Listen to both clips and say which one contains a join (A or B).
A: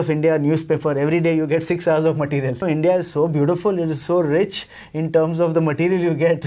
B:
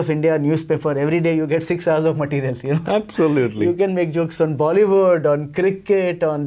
A